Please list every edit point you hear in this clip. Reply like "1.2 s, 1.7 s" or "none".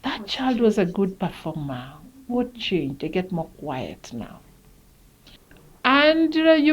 5.4 s